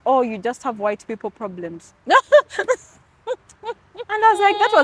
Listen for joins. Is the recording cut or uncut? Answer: uncut